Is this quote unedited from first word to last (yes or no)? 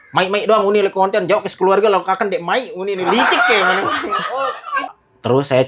no